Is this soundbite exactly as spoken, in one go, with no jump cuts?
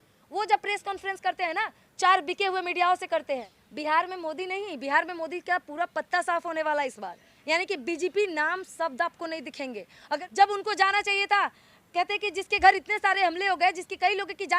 no; 2 cuts; at 3.6 s, 10.2 s

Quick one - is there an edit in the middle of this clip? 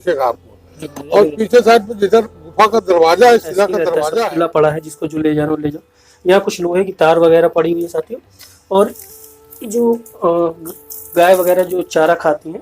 yes; 1 cut; at 4.0 s

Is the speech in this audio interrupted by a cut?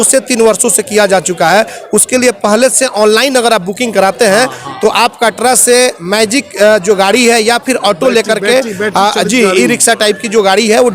no; 0 cuts

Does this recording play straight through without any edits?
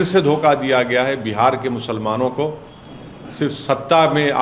yes; 0 cuts

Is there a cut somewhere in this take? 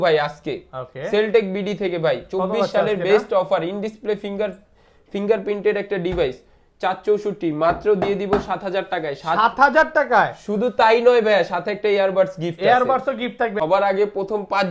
yes; 1 cut; at 13.6 s

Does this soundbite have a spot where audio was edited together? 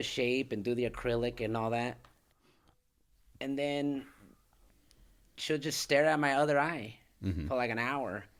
no; 0 cuts

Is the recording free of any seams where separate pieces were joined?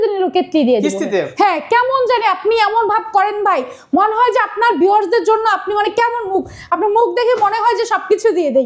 yes; 0 cuts

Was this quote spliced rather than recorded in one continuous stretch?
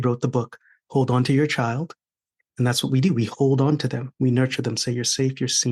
no; 0 cuts

